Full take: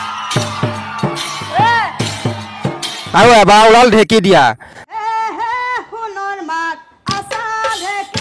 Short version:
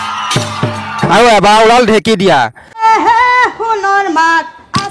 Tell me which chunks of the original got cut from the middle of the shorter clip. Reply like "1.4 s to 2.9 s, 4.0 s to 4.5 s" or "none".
1.1 s to 3.1 s, 4.9 s to 5.1 s